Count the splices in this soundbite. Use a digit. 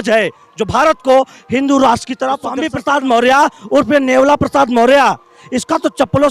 1